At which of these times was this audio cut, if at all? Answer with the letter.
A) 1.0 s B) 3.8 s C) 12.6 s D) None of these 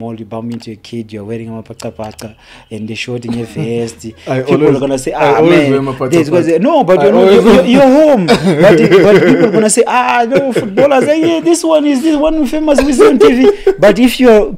D